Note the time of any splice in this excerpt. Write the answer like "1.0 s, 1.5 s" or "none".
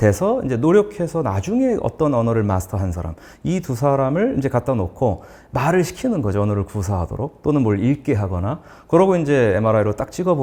none